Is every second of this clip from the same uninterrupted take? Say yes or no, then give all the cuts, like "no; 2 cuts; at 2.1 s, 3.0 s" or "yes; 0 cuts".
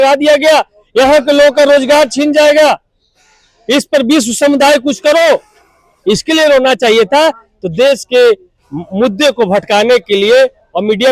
yes; 0 cuts